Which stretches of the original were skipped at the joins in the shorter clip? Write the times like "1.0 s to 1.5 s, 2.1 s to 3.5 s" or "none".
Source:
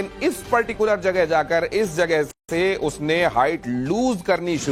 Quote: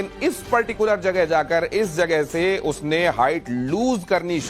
2.3 s to 2.5 s